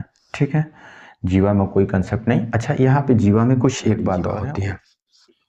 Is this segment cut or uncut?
cut